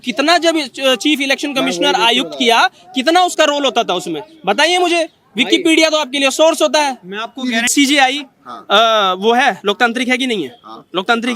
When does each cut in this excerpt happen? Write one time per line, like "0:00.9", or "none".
0:07.7